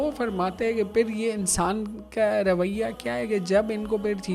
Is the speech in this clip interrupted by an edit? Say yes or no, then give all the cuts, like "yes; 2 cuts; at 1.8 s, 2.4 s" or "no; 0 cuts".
no; 0 cuts